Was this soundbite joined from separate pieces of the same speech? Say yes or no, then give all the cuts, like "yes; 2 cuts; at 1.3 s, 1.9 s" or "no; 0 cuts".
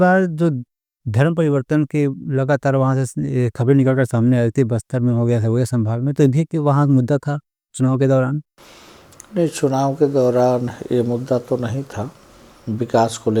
no; 0 cuts